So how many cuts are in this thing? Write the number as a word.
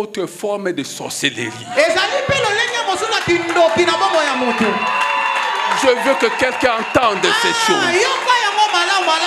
zero